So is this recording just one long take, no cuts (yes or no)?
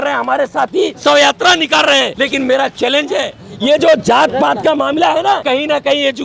no